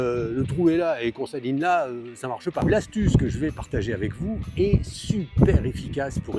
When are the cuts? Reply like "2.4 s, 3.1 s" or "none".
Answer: 2.6 s

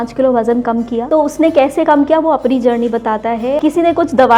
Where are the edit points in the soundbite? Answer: 1.0 s, 3.6 s

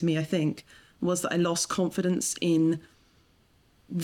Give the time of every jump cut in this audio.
none

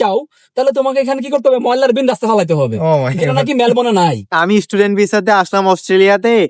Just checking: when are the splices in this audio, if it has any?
4.3 s

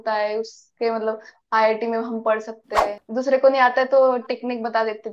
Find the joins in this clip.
3.0 s

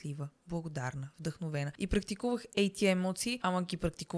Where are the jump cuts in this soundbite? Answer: 1.7 s, 3.4 s

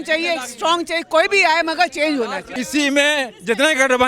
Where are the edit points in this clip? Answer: 2.4 s

